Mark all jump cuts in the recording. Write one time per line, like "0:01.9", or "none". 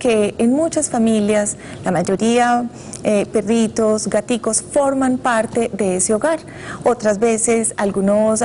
0:06.0